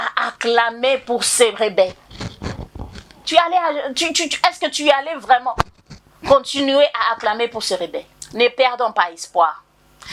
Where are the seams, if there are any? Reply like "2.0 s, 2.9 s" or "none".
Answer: 8.0 s